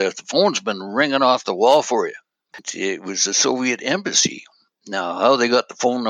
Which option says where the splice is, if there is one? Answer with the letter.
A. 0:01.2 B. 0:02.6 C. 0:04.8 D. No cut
B